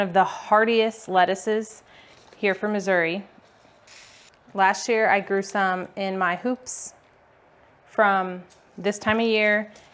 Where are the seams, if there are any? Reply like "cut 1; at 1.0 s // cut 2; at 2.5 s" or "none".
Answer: none